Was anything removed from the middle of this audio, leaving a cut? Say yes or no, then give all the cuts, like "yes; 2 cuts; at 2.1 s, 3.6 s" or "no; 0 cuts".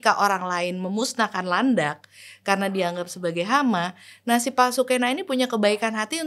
no; 0 cuts